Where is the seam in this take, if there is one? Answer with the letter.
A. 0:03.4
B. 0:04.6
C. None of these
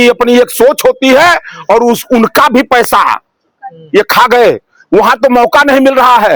B